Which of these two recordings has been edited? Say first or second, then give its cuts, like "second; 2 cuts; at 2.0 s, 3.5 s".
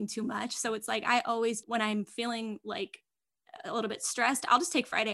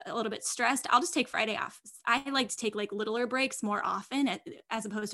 first; 1 cut; at 1.6 s